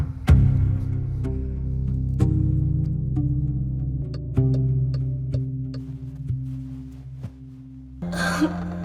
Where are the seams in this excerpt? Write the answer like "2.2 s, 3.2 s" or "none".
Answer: 4.0 s, 8.0 s